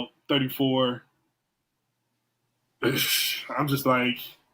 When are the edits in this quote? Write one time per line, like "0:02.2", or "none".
none